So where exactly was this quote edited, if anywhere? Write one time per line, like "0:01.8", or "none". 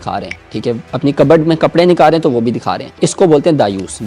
0:03.0

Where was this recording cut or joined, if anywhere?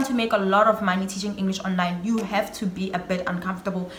none

